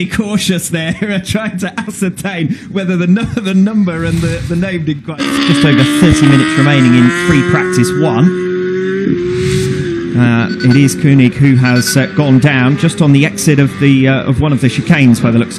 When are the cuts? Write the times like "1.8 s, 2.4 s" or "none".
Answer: 5.2 s